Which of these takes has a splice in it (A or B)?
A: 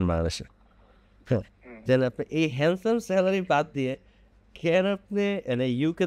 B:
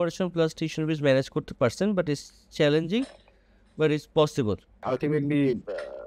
B